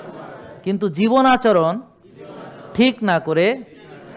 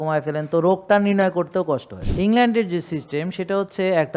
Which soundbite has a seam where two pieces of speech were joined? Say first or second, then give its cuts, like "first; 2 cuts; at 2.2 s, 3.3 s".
second; 1 cut; at 2.0 s